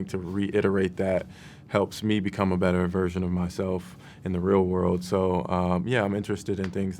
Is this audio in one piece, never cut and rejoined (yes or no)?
yes